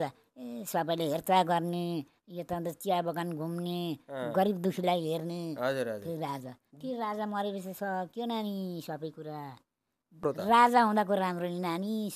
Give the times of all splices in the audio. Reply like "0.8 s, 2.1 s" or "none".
10.2 s